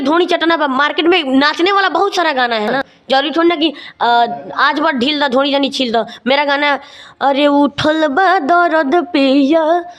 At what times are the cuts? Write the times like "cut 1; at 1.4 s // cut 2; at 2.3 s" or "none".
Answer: none